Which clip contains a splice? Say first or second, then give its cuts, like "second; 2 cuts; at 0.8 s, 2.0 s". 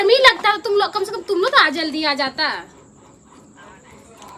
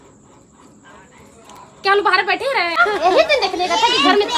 second; 1 cut; at 2.8 s